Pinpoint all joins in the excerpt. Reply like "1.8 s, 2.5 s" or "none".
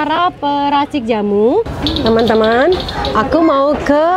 1.8 s